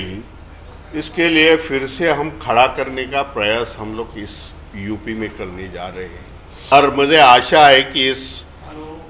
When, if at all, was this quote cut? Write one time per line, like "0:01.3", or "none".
none